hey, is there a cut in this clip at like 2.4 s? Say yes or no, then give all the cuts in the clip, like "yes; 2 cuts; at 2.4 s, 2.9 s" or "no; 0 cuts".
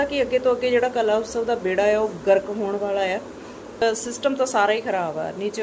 no; 1 cut; at 3.8 s